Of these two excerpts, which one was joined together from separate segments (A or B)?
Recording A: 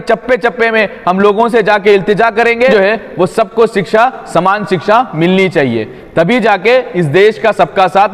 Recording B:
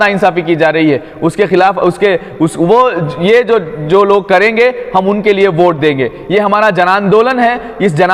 A